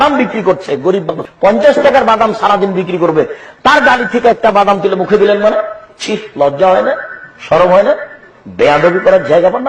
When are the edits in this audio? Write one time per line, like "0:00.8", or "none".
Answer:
0:01.0